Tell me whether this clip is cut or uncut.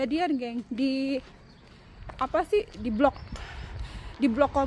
uncut